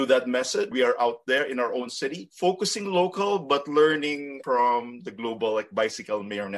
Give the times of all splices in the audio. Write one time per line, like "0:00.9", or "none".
none